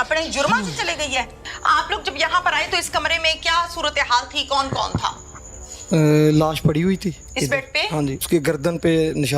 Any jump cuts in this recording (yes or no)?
yes